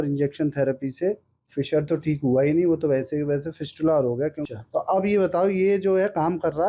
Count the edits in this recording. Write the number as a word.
one